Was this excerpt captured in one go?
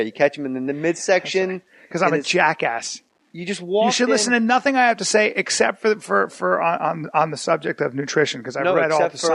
yes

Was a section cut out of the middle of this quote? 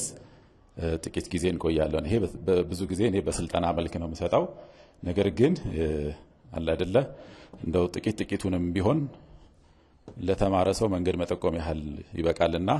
no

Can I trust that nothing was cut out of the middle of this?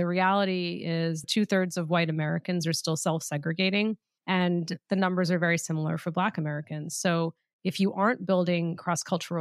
no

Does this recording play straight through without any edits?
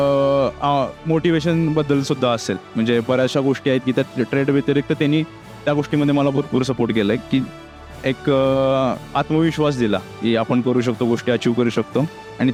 yes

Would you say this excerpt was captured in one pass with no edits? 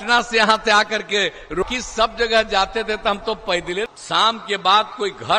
no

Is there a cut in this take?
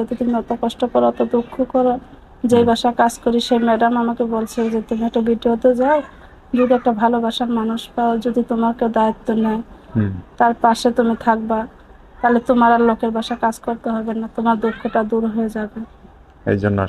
no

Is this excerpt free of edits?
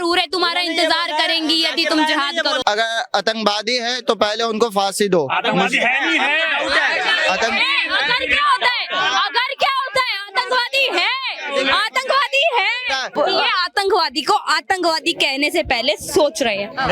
no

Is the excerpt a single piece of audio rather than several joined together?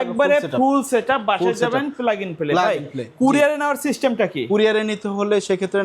yes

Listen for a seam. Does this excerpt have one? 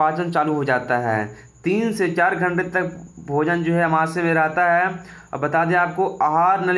no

